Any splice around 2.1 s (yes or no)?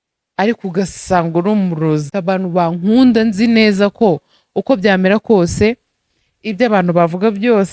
yes